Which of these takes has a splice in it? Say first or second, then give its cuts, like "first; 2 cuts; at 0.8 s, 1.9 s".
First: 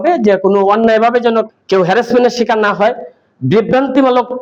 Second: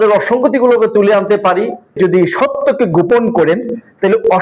second; 1 cut; at 2.0 s